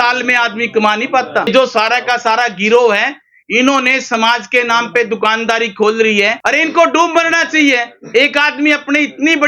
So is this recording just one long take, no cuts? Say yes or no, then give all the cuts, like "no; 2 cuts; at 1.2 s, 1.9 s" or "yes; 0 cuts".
no; 2 cuts; at 1.5 s, 6.4 s